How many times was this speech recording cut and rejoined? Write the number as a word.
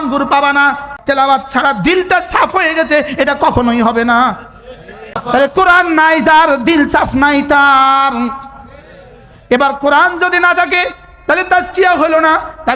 two